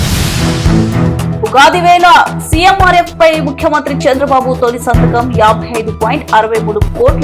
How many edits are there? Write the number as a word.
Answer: one